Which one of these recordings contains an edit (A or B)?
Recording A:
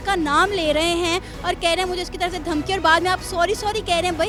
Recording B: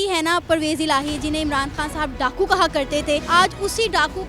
B